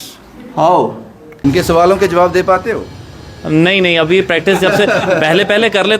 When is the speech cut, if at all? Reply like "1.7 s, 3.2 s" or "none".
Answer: 1.3 s

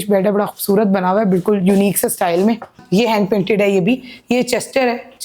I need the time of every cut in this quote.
2.8 s

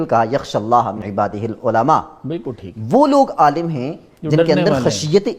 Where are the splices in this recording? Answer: 1.0 s

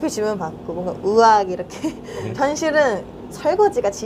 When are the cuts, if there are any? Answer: 2.2 s

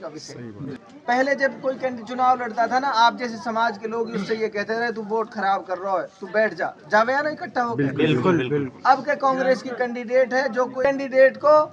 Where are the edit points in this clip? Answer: 0.8 s, 10.8 s

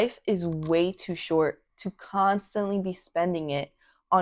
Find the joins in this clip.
none

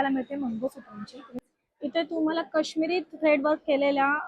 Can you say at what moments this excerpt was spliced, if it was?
1.4 s

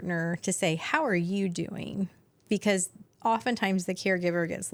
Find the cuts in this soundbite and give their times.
none

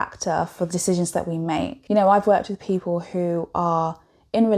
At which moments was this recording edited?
1.8 s

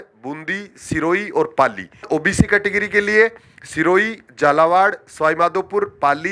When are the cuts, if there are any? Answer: 2.0 s

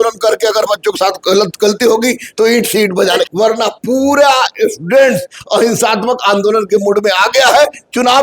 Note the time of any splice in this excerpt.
3.3 s

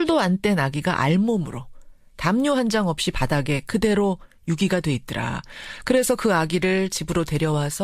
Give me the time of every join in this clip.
4.0 s

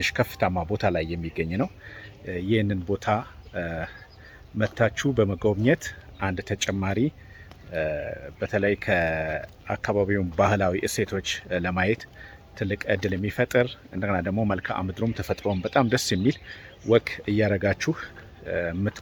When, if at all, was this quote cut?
none

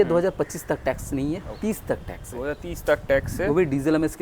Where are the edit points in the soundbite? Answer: none

